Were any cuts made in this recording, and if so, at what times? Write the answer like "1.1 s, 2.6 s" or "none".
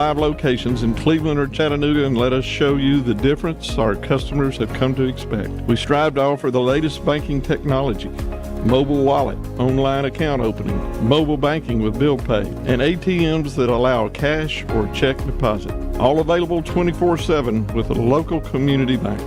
none